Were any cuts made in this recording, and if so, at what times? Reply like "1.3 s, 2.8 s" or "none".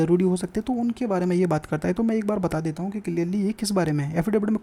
none